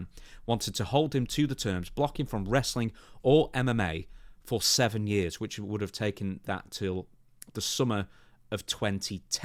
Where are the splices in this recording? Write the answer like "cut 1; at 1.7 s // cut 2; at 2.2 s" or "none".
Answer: none